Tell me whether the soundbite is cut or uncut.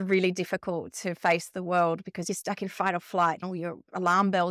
cut